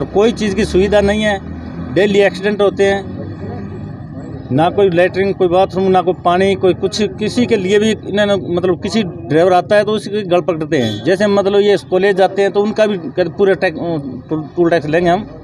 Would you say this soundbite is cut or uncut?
uncut